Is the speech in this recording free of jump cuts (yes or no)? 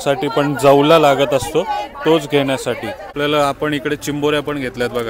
no